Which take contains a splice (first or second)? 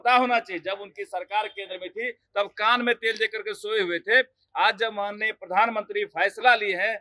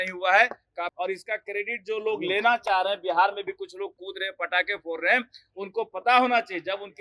second